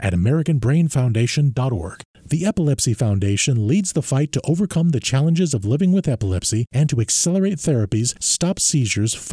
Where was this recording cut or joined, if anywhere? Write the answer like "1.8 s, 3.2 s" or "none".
2.0 s

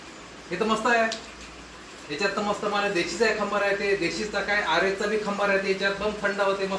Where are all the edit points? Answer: none

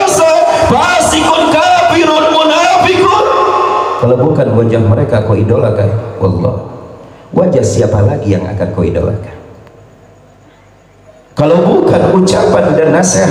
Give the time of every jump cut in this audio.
none

